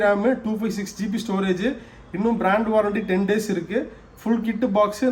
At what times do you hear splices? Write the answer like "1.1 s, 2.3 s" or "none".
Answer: none